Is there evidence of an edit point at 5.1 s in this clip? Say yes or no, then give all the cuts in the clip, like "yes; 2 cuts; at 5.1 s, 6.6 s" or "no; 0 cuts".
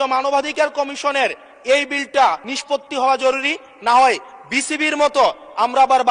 no; 1 cut; at 2.5 s